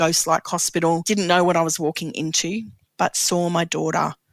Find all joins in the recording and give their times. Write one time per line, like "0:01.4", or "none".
0:01.0
0:02.8